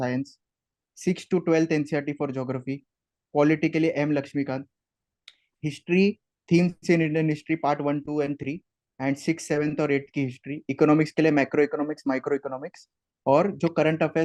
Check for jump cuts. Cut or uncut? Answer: uncut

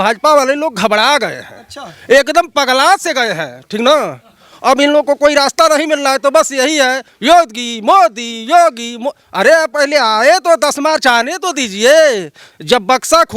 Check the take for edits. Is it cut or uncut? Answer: uncut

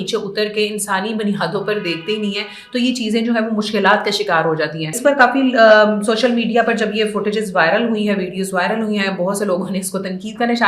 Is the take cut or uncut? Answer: cut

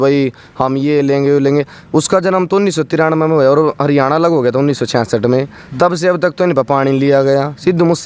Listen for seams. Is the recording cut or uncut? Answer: uncut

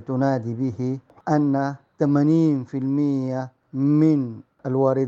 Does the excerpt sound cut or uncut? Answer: cut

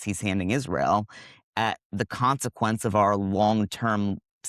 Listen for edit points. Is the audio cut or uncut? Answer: uncut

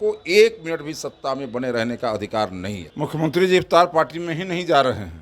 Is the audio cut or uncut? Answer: cut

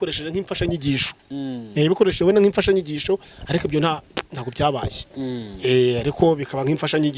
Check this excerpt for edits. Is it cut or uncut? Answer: uncut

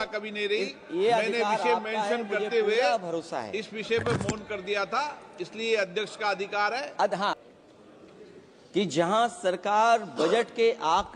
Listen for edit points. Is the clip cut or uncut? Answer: cut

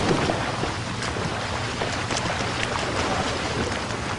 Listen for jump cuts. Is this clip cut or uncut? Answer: uncut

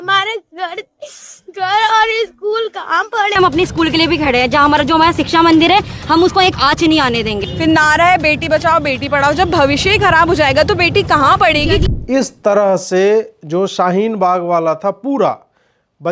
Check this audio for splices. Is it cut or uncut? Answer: cut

